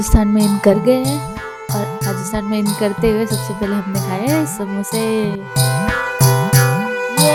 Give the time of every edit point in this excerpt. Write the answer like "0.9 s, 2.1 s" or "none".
none